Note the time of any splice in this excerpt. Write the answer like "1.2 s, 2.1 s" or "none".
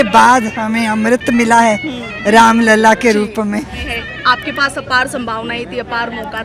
3.8 s